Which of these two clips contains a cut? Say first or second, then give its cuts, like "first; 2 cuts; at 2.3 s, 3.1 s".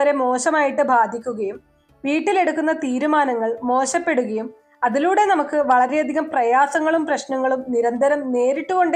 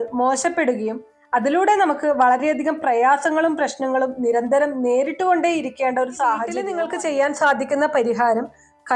second; 1 cut; at 6.8 s